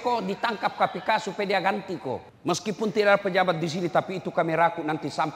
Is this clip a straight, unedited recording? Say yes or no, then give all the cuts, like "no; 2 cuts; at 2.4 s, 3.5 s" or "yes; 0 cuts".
no; 1 cut; at 2.3 s